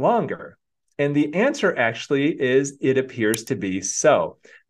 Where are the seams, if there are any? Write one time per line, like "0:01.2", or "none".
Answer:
none